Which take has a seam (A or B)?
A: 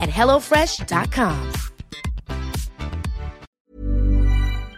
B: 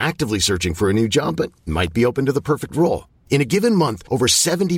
A